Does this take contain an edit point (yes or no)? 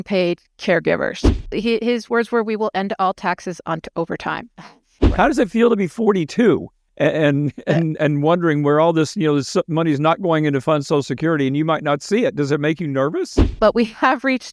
yes